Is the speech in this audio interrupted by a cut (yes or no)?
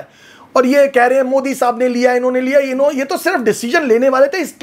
no